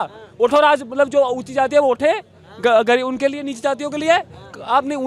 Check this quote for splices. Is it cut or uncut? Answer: uncut